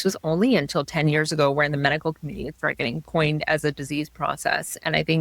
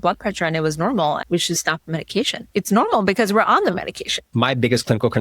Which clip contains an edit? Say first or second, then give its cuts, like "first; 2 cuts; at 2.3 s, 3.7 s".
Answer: second; 3 cuts; at 1.2 s, 2.4 s, 4.3 s